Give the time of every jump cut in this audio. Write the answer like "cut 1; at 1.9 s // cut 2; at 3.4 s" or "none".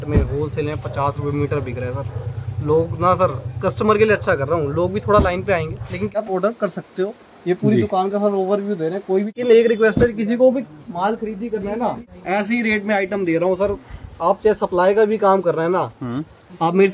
cut 1; at 6.2 s // cut 2; at 9.4 s // cut 3; at 12.1 s

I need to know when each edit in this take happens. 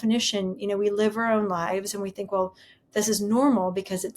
none

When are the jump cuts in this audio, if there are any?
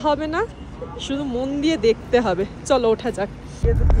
none

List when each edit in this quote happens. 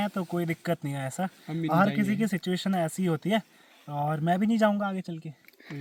none

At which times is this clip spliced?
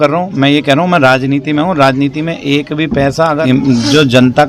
cut 1; at 3.4 s

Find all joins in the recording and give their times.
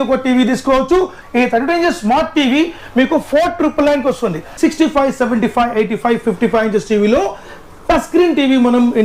cut 1; at 1.2 s // cut 2; at 4.5 s

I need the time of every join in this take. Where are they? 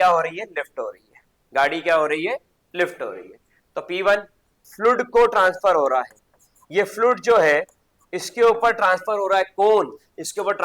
cut 1; at 4.6 s

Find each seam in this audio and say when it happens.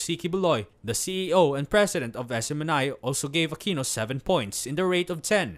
none

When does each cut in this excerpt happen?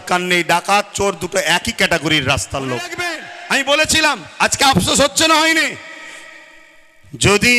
cut 1; at 3.3 s

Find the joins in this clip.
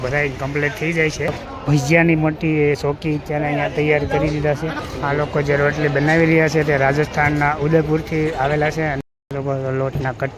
cut 1; at 1.5 s // cut 2; at 4.9 s // cut 3; at 9.0 s

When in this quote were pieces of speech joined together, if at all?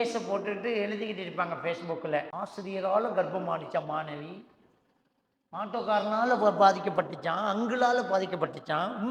cut 1; at 2.3 s

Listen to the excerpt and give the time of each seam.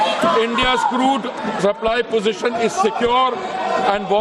cut 1; at 1.5 s

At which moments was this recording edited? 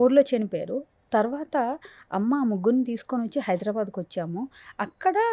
none

